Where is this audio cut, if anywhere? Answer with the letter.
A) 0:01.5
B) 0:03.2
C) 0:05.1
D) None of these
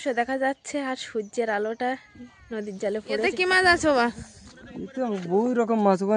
B